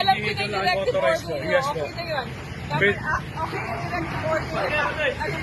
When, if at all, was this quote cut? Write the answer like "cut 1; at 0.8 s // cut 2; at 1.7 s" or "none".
none